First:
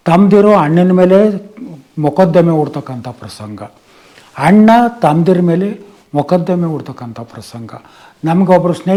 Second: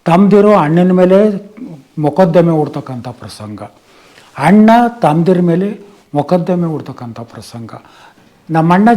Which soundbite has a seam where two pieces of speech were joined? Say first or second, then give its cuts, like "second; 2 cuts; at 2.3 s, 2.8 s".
second; 1 cut; at 8.1 s